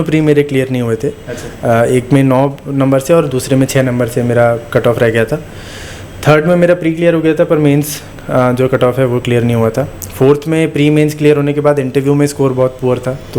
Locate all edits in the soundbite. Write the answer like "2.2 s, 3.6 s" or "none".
none